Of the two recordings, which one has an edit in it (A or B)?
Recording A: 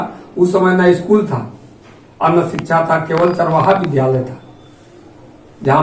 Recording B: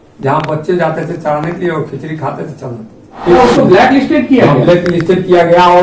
B